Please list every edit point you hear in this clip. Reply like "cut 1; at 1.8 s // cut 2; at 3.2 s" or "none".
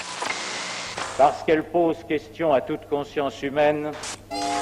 none